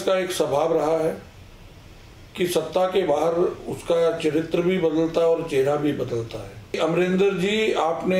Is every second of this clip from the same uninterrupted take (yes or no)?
no